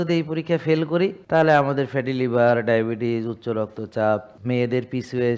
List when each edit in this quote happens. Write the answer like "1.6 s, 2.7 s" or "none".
1.2 s, 4.3 s